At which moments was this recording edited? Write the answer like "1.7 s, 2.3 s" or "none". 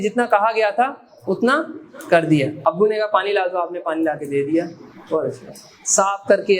2.6 s